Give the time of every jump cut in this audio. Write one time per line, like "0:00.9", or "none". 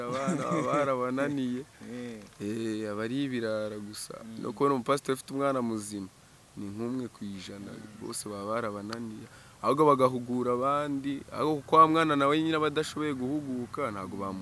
none